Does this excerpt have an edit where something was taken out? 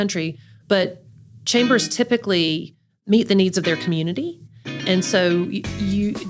yes; 1 cut; at 2.9 s

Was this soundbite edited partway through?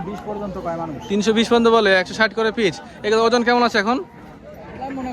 no; 0 cuts

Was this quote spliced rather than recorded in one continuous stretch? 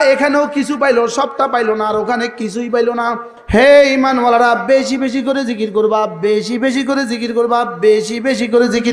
yes; 1 cut; at 3.3 s

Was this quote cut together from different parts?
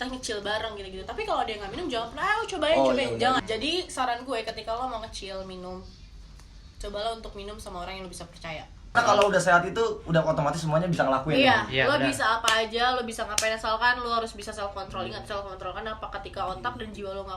yes; 2 cuts; at 3.4 s, 8.9 s

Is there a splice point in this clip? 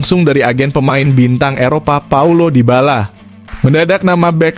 no; 0 cuts

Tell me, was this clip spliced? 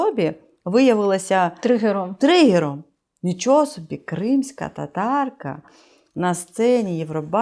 no; 0 cuts

